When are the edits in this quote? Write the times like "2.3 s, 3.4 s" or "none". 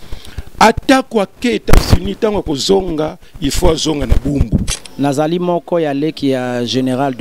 4.7 s